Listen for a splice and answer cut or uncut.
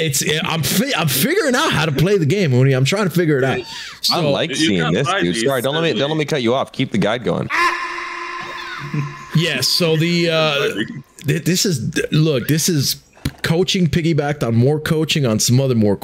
uncut